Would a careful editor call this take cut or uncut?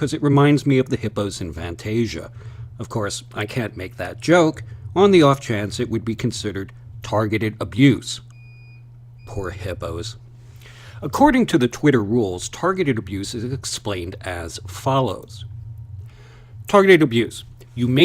uncut